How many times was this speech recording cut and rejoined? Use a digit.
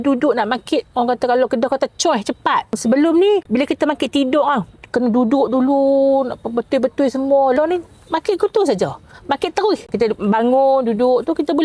2